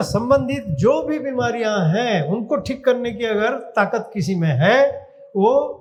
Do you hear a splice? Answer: no; 0 cuts

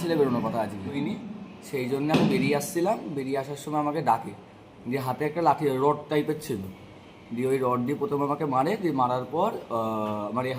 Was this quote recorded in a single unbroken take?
no; 1 cut; at 0.9 s

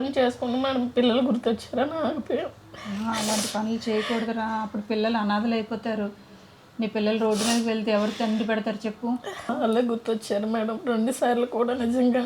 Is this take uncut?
yes; 0 cuts

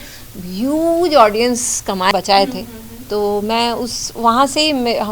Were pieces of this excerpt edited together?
yes; 1 cut; at 2.1 s

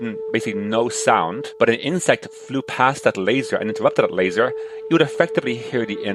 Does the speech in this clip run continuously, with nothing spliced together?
yes; 0 cuts

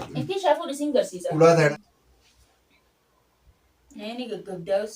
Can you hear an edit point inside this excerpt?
yes; 1 cut; at 1.5 s

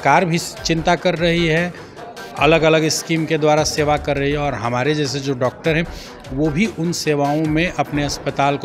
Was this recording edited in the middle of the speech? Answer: no; 0 cuts

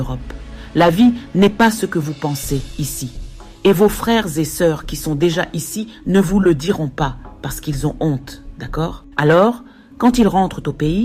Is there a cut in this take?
no; 0 cuts

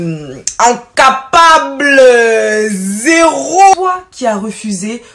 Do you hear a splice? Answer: no; 0 cuts

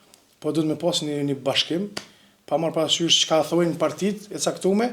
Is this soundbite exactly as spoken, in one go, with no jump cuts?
yes; 0 cuts

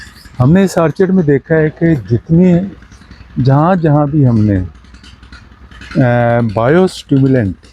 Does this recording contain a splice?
no; 0 cuts

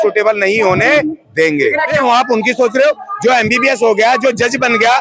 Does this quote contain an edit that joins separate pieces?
yes; 1 cut; at 1.9 s

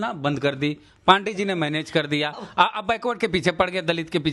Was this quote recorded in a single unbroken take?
yes; 0 cuts

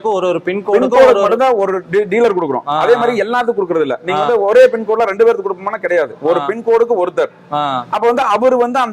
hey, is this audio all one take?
yes; 0 cuts

